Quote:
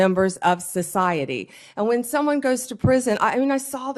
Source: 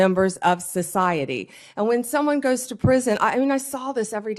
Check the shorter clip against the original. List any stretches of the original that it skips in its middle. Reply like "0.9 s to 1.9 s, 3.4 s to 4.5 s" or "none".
none